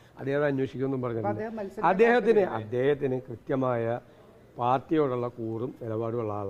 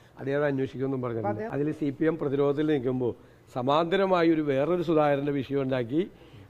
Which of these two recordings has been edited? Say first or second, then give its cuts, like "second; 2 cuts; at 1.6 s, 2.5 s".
second; 1 cut; at 1.4 s